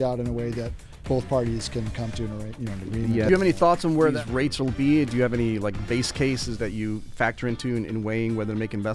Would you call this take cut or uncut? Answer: cut